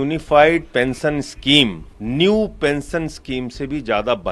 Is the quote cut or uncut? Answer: cut